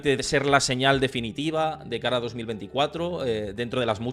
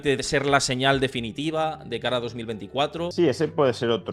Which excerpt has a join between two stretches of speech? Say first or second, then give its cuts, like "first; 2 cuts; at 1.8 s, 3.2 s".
second; 1 cut; at 3.1 s